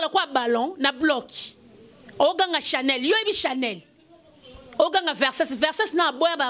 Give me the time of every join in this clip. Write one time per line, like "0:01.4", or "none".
none